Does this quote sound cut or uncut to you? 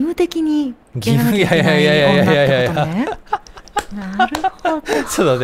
uncut